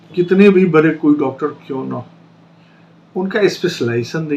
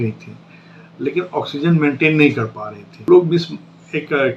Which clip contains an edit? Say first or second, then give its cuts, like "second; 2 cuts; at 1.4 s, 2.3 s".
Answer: second; 1 cut; at 3.1 s